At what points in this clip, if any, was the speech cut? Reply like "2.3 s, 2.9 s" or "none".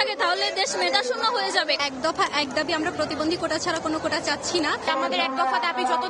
none